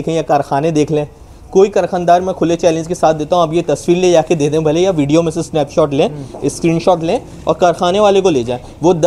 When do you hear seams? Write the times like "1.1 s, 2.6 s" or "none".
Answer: none